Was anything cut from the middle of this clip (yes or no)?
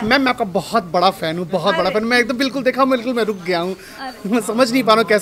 no